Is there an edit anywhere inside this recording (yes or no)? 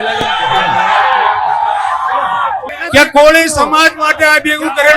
yes